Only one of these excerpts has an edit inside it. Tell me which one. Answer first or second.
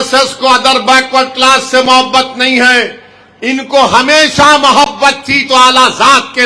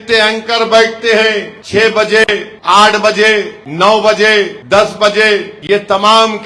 second